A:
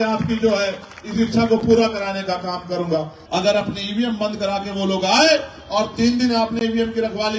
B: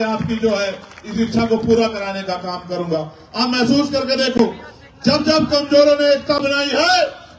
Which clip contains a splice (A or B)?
A